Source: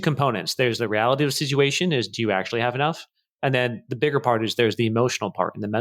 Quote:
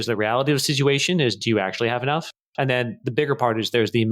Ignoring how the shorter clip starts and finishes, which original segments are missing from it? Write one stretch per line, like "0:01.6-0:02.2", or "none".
0:03.1-0:03.2